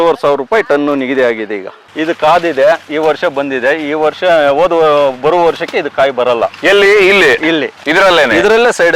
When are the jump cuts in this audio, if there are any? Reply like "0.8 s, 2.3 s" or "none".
1.9 s, 7.8 s